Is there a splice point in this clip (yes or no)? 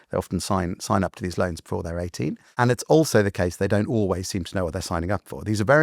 yes